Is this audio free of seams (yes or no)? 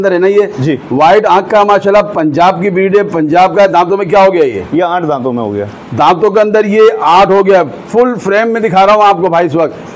yes